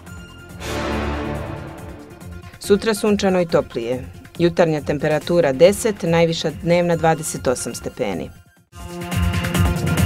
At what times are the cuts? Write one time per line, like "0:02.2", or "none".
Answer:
0:08.8

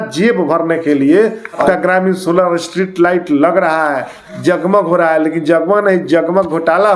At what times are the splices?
0:01.6

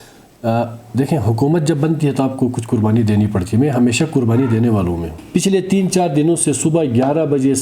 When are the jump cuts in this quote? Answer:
0:05.1

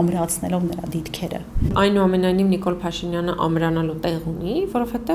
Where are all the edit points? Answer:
0:01.7

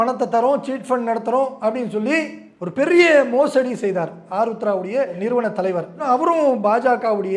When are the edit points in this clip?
none

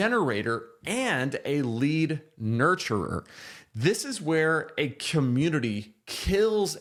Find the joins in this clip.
none

